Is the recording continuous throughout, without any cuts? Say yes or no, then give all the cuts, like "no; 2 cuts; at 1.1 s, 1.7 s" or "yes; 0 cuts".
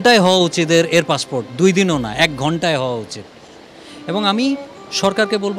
yes; 0 cuts